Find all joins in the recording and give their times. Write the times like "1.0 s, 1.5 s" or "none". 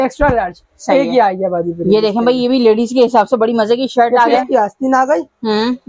4.3 s